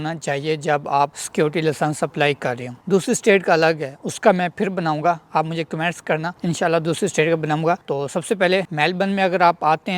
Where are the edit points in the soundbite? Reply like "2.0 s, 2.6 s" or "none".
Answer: none